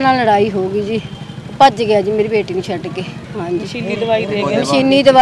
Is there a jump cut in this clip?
yes; 1 cut; at 3.2 s

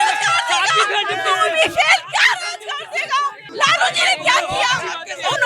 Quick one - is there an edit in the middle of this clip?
yes; 1 cut; at 3.4 s

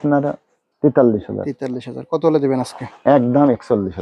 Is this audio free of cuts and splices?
yes; 0 cuts

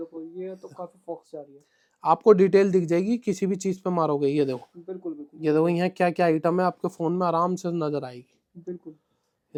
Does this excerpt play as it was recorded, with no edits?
yes; 0 cuts

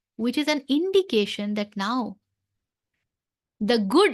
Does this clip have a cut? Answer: no; 0 cuts

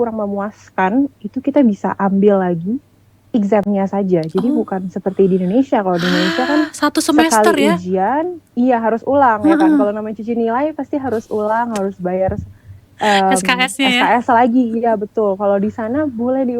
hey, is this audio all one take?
yes; 0 cuts

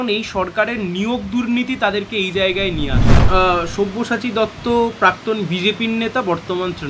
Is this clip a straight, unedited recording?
no; 1 cut; at 3.3 s

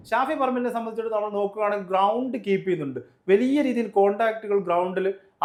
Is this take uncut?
yes; 0 cuts

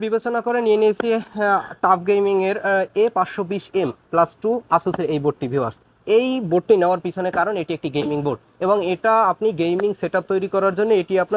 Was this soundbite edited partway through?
no; 0 cuts

